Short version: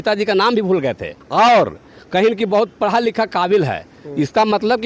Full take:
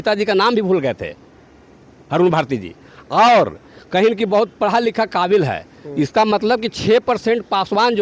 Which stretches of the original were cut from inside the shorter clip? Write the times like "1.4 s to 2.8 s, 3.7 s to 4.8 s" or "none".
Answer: 1.1 s to 2.9 s

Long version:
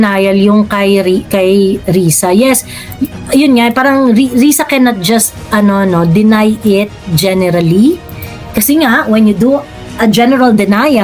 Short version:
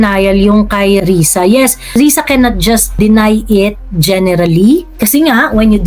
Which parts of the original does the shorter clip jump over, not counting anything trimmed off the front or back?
1.0 s to 1.9 s, 2.8 s to 4.3 s, 5.4 s to 6.1 s, 8.1 s to 8.5 s

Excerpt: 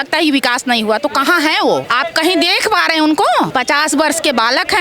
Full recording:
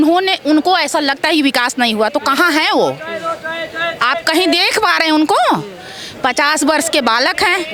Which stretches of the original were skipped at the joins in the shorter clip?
3.0 s to 4.0 s, 5.6 s to 6.2 s

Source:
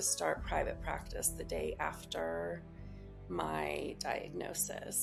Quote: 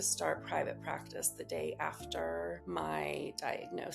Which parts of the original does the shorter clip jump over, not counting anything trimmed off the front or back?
2.6 s to 3.2 s

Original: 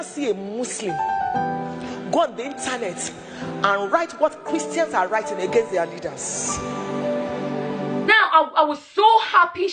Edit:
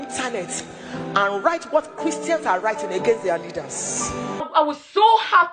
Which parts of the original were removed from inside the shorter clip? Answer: 6.9 s to 8.4 s

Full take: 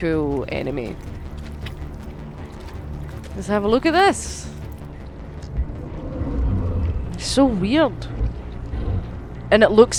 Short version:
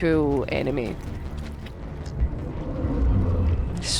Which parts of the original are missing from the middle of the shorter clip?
1.6 s to 5.0 s

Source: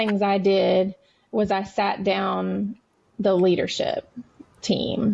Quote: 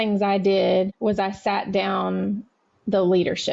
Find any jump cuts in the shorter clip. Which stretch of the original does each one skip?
0.9 s to 1.3 s

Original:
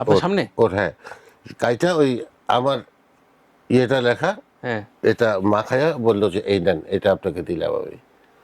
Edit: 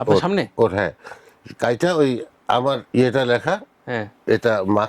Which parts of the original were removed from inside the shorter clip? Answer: 2.8 s to 3.6 s

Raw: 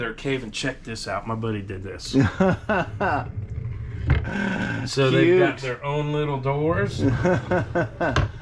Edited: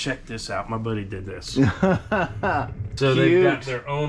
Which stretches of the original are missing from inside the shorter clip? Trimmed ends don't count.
3.4 s to 4.8 s

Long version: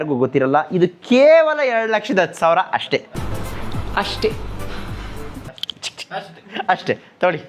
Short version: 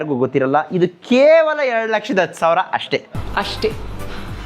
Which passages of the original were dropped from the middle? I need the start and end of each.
3.1 s to 3.7 s

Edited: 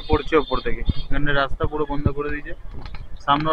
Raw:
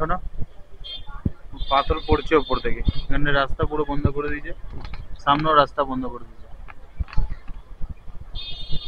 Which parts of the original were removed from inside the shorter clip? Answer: none

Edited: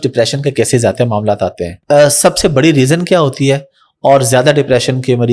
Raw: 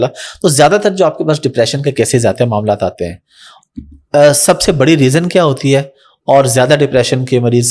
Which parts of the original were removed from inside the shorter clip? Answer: 3.1 s to 3.9 s

